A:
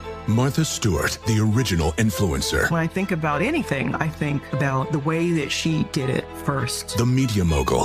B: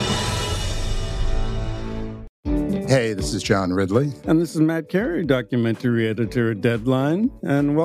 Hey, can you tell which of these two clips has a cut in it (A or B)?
B